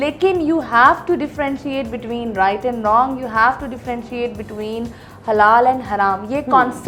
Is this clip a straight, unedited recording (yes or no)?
yes